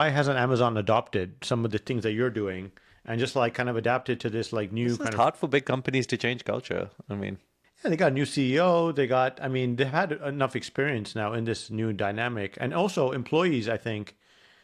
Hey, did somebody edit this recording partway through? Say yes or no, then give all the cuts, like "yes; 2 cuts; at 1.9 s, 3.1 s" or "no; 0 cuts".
no; 0 cuts